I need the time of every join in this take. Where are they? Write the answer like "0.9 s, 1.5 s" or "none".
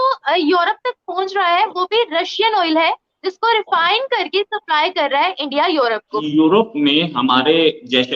6.2 s